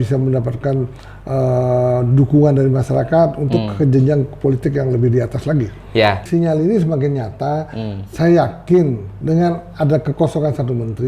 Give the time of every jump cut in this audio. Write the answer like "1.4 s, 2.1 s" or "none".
6.2 s